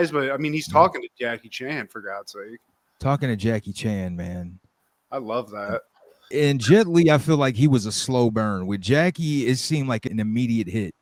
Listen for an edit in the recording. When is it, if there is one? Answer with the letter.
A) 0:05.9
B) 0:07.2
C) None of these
C